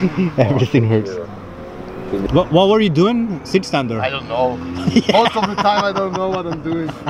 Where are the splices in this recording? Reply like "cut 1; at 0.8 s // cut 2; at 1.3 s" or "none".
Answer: cut 1; at 2.0 s

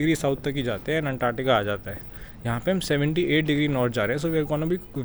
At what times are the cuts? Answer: none

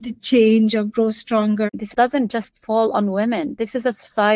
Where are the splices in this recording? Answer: cut 1; at 1.7 s

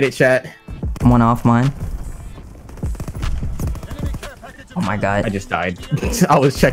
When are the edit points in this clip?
none

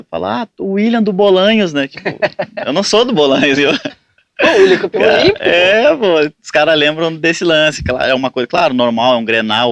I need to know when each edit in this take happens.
none

